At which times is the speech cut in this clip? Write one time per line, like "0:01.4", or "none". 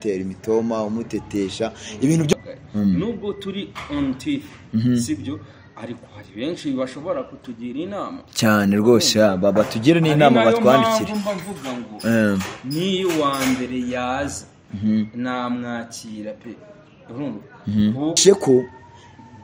0:02.3
0:18.2